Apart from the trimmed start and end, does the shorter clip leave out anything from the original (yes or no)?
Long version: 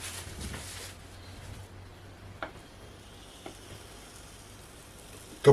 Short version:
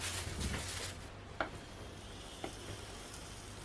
yes